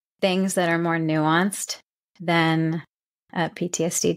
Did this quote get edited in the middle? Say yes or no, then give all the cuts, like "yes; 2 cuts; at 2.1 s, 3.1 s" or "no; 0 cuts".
no; 0 cuts